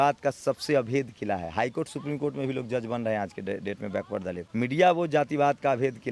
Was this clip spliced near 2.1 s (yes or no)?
no